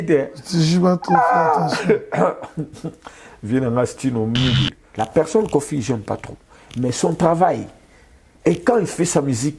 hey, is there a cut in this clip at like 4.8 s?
yes; 1 cut; at 4.8 s

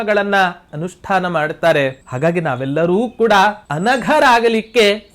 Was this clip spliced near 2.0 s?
yes; 2 cuts; at 2.0 s, 3.7 s

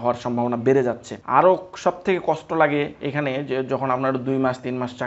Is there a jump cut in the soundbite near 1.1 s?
yes; 1 cut; at 1.1 s

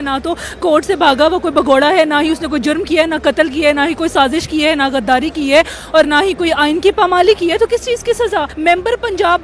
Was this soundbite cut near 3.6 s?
no; 1 cut; at 8.5 s

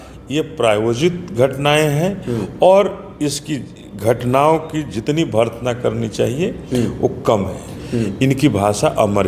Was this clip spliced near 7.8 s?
yes; 1 cut; at 7.8 s

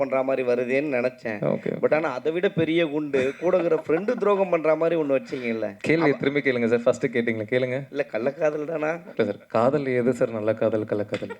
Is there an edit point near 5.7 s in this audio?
yes; 2 cuts; at 5.7 s, 9.0 s

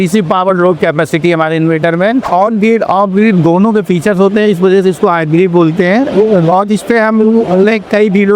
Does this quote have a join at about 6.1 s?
no; 1 cut; at 2.3 s

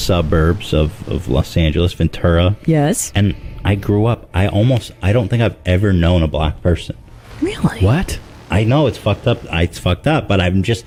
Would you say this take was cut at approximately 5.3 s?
no; 0 cuts

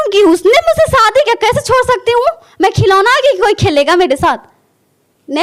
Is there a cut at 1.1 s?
no; 0 cuts

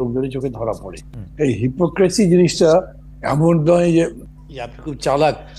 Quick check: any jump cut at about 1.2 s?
yes; 2 cuts; at 1.2 s, 4.2 s

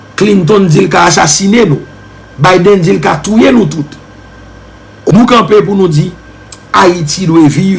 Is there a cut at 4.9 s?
yes; 1 cut; at 4.9 s

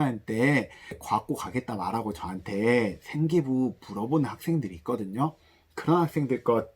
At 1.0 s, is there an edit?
yes; 1 cut; at 1.0 s

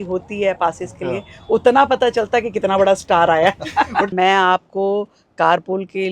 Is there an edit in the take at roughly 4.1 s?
yes; 1 cut; at 4.1 s

